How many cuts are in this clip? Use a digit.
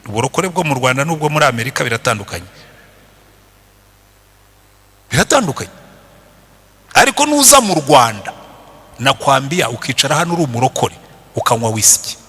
0